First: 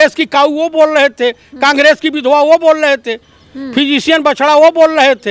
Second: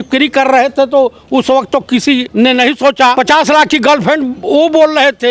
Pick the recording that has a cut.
second; 2 cuts; at 2.3 s, 3.2 s

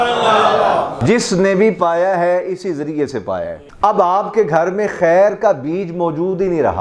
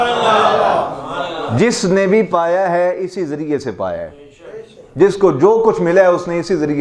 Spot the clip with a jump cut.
first; 2 cuts; at 0.9 s, 3.7 s

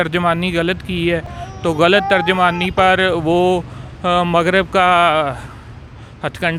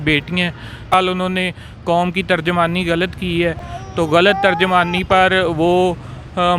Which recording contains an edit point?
second; 1 cut; at 0.9 s

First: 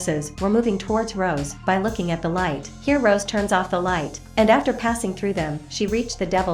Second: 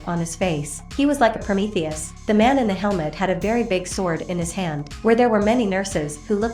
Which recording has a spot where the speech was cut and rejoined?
second; 1 cut; at 4.8 s

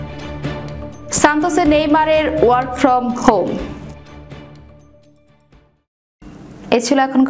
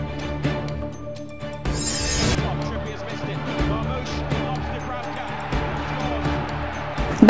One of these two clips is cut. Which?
second; 1 cut; at 1.0 s

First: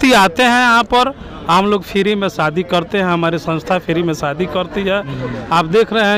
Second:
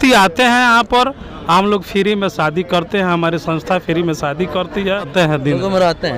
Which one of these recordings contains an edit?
second; 1 cut; at 5.1 s

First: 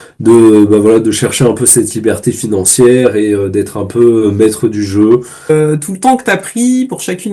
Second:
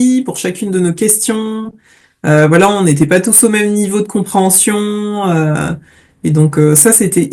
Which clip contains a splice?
first; 1 cut; at 5.5 s

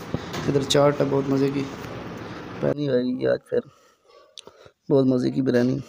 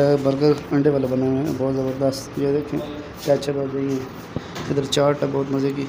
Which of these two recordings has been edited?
first; 1 cut; at 2.7 s

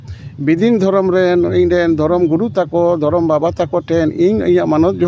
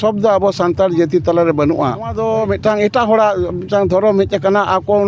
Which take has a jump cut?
second; 1 cut; at 2.2 s

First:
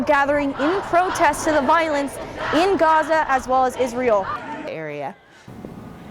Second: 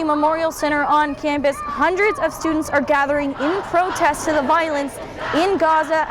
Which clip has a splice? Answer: first; 1 cut; at 4.7 s

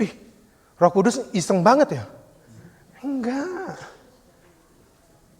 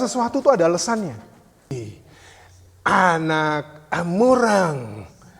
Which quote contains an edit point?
second; 1 cut; at 1.7 s

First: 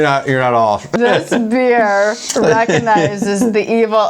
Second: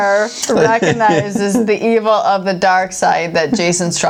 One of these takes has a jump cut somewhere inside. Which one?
first; 1 cut; at 0.9 s

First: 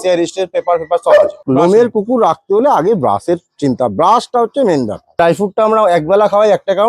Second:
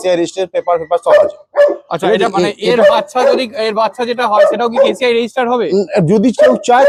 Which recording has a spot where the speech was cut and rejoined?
first; 2 cuts; at 1.4 s, 5.2 s

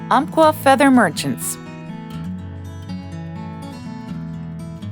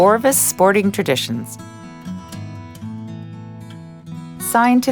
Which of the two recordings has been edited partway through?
first; 1 cut; at 1.8 s

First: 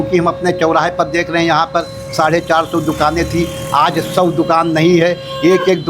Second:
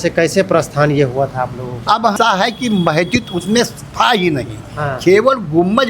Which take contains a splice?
second; 1 cut; at 2.1 s

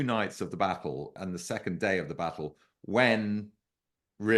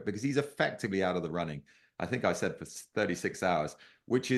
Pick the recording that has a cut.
first; 1 cut; at 1.1 s

